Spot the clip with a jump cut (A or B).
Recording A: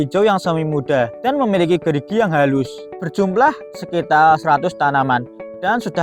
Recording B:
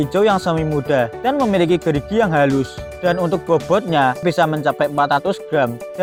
A